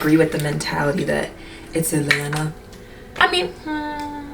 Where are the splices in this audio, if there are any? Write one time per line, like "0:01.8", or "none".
0:03.2